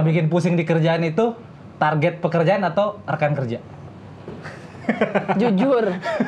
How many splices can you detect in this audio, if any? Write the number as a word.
zero